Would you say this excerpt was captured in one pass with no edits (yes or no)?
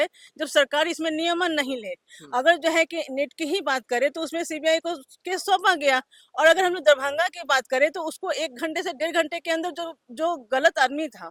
yes